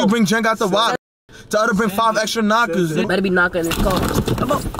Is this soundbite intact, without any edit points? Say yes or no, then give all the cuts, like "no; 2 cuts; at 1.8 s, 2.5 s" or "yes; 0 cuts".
no; 1 cut; at 3.1 s